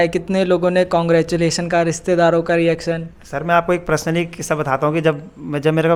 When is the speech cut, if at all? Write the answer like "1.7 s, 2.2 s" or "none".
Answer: none